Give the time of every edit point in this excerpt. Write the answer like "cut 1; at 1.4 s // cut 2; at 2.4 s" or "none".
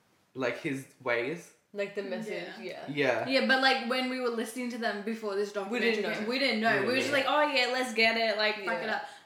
none